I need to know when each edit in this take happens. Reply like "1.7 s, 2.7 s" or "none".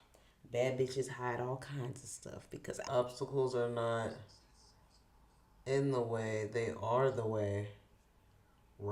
2.9 s